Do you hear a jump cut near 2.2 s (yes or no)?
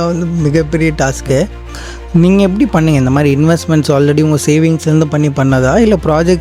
no